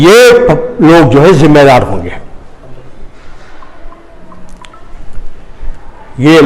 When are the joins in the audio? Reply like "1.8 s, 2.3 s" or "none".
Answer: 3.4 s